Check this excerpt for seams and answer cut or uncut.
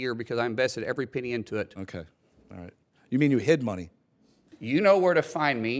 cut